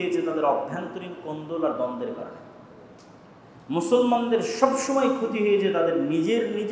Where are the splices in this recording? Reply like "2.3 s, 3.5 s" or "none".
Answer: none